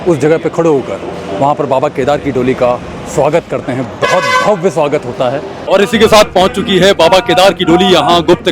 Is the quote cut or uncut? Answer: cut